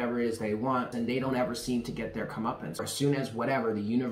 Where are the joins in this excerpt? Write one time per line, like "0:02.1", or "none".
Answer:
0:00.9
0:02.8